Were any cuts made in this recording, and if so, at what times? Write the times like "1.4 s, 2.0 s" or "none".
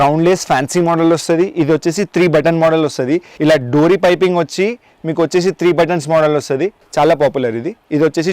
3.3 s, 6.8 s